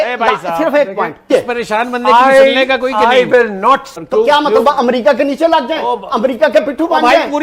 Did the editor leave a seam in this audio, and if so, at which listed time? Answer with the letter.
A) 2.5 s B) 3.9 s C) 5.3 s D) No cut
B